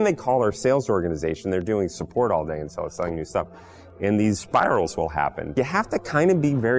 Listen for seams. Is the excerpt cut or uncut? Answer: cut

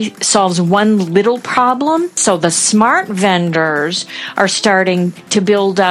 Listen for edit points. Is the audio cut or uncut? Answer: cut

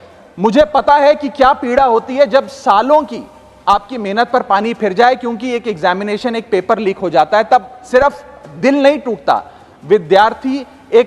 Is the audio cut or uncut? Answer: uncut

